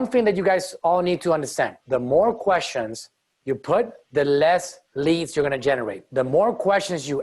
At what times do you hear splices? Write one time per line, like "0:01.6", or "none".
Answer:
0:01.8
0:04.0
0:04.8
0:06.0